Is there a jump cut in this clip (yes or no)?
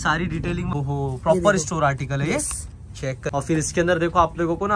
yes